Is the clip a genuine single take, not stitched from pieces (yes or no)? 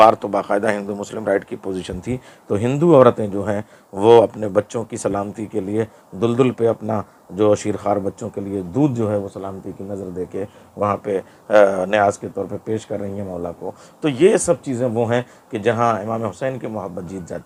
yes